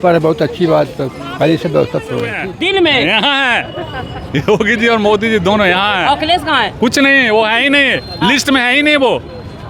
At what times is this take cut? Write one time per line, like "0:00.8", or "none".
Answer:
0:02.4